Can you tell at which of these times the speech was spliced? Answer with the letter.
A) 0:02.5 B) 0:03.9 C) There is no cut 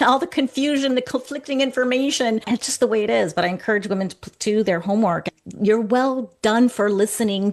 A